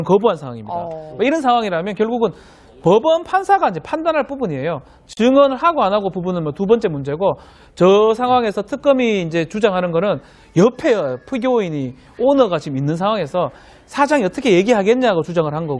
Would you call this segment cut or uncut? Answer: cut